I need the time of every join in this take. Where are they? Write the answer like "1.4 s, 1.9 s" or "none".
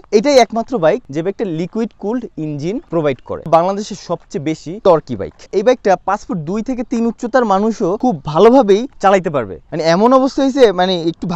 3.5 s, 4.7 s, 5.4 s, 8.0 s, 9.6 s